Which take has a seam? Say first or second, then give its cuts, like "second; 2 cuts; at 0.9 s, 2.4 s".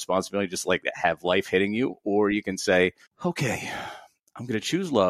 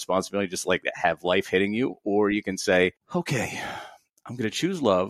second; 1 cut; at 3.0 s